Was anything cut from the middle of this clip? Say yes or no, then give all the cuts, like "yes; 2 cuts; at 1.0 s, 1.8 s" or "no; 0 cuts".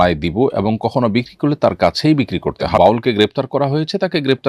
yes; 1 cut; at 2.8 s